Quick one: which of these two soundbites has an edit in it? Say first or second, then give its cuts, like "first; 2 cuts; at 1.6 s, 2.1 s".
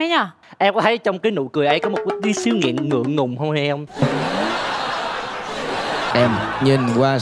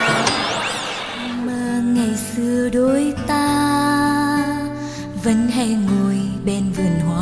first; 1 cut; at 6.1 s